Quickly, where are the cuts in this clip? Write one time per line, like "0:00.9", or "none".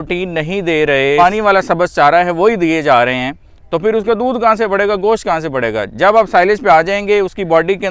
0:01.2

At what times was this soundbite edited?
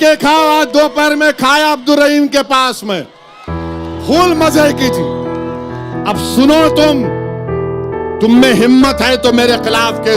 0:04.9
0:06.2

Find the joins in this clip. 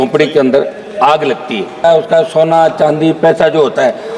0:01.8

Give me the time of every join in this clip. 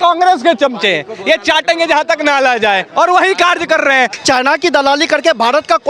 0:04.1

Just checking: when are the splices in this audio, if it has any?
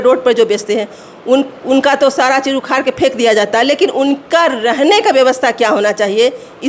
none

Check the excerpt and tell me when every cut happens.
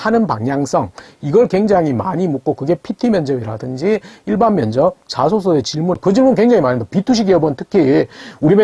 0:06.0

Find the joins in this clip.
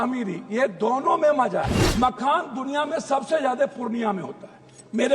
0:01.8

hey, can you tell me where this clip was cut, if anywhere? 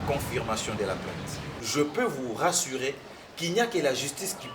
0:01.5

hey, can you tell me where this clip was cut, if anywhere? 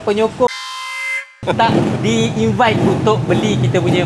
none

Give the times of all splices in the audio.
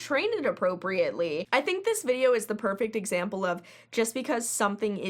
0:01.5

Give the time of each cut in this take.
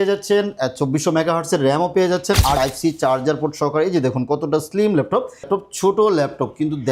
0:02.6
0:05.5

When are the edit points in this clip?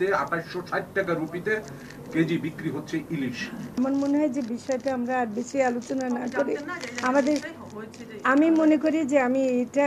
0:03.7

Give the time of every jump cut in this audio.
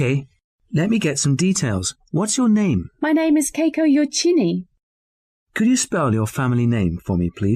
none

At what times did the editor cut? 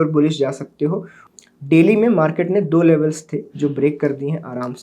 0:01.2

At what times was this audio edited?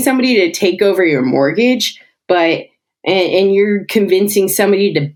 none

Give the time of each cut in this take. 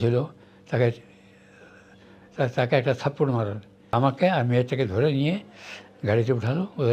0:03.9

